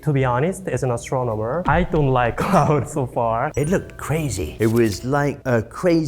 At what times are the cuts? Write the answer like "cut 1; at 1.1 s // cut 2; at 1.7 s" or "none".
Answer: cut 1; at 3.5 s